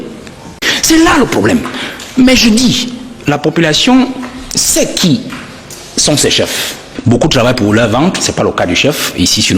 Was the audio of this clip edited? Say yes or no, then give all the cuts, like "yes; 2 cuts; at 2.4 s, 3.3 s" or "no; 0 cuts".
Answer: yes; 1 cut; at 6.9 s